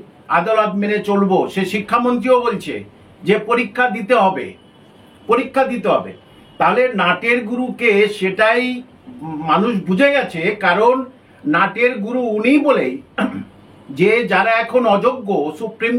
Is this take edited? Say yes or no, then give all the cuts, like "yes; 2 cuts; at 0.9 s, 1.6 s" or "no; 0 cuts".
no; 0 cuts